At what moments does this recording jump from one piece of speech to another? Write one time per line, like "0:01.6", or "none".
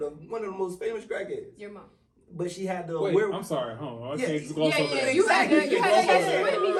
none